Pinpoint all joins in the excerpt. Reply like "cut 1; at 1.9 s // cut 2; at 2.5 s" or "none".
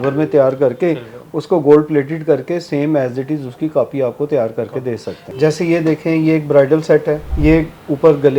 cut 1; at 5.2 s // cut 2; at 7.3 s